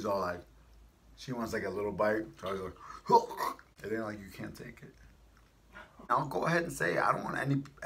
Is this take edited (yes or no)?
yes